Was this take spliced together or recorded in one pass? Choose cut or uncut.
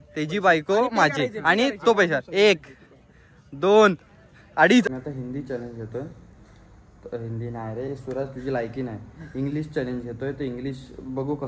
cut